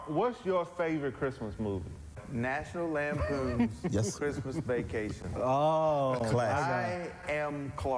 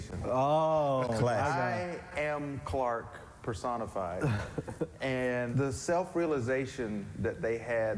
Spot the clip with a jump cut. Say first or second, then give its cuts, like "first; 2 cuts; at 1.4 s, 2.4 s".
second; 1 cut; at 5.5 s